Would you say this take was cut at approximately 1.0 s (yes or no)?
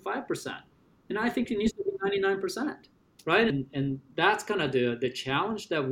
no